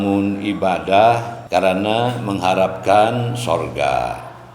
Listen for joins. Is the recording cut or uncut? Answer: cut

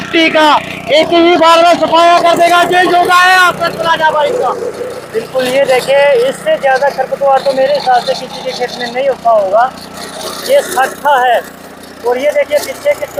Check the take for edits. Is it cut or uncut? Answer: uncut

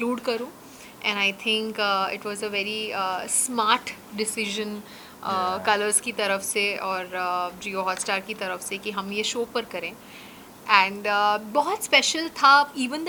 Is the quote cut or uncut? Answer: uncut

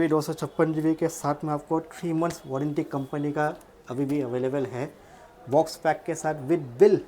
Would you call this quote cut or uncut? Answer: uncut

